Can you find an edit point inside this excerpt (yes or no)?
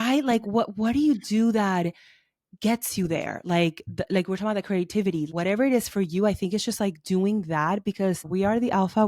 yes